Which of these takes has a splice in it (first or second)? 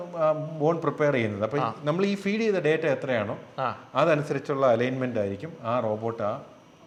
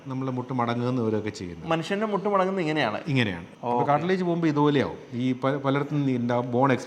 second